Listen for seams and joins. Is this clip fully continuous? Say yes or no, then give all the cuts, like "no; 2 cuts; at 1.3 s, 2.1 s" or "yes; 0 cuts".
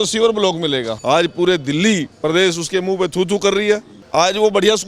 no; 2 cuts; at 0.9 s, 4.0 s